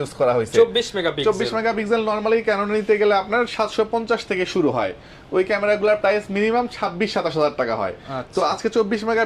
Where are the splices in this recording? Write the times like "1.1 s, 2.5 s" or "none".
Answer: none